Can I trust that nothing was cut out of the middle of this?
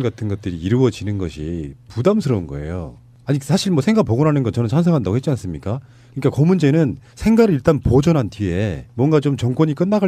yes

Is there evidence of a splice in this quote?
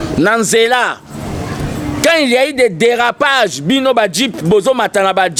no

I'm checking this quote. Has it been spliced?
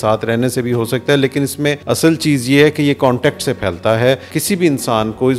yes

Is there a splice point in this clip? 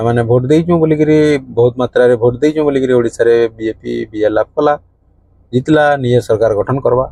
no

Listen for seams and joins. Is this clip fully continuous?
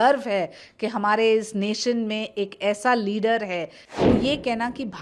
no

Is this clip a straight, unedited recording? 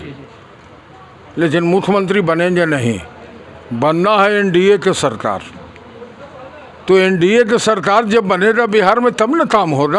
yes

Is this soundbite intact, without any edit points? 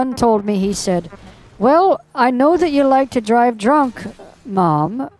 yes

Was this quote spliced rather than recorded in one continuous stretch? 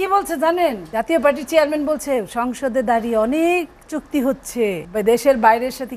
yes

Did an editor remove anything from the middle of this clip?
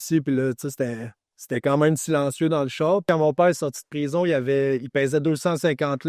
yes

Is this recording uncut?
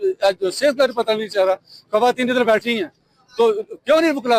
yes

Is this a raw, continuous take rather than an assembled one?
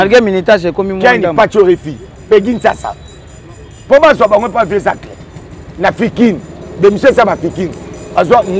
yes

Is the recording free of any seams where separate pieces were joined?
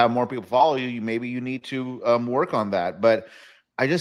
yes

